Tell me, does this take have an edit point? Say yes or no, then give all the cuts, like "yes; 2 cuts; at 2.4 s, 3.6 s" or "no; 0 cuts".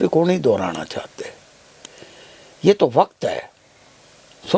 no; 0 cuts